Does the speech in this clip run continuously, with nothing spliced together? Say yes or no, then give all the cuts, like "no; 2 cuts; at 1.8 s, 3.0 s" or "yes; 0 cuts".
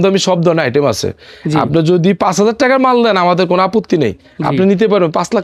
yes; 0 cuts